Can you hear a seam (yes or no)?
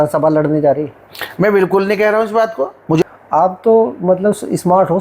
yes